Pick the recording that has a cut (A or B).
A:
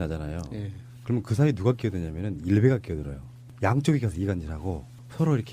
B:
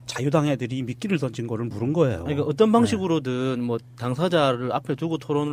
A